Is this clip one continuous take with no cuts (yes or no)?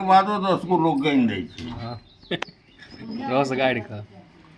yes